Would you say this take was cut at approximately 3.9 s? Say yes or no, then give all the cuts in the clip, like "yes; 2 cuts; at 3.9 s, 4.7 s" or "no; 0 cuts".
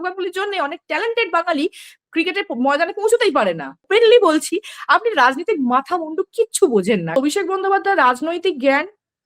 yes; 2 cuts; at 3.9 s, 7.2 s